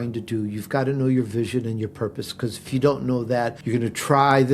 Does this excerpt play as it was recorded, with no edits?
no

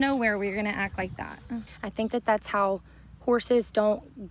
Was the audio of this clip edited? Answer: yes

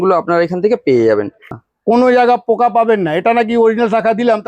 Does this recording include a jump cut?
yes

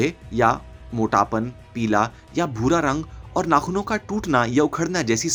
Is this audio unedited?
yes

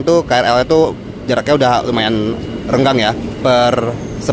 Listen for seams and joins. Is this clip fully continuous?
yes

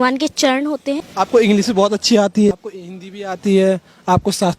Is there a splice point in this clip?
yes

